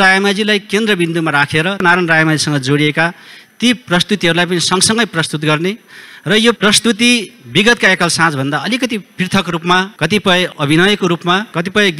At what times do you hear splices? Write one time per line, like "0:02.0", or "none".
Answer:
0:01.8